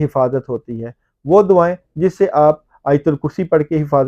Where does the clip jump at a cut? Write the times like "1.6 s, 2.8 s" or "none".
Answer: none

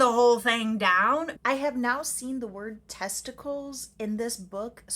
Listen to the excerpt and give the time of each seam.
1.3 s

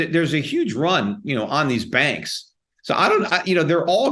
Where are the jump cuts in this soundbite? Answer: none

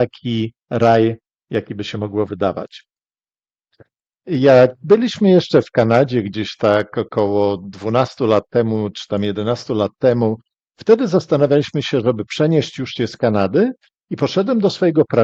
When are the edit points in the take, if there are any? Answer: none

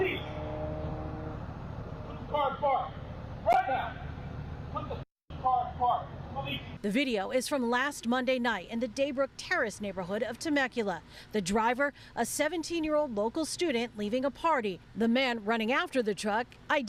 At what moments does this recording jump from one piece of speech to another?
none

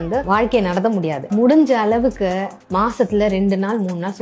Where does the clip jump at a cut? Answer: 1.2 s

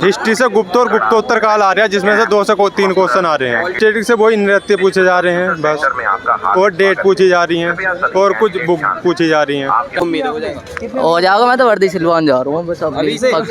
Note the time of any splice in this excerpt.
3.7 s, 10.0 s

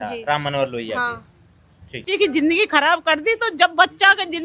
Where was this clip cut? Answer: 2.0 s

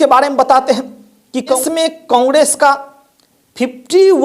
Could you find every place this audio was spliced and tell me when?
1.6 s

